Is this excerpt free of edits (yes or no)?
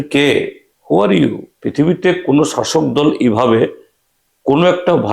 no